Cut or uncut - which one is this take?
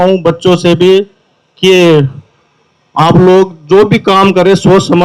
uncut